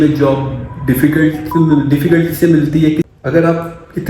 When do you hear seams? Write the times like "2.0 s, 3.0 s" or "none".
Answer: 3.1 s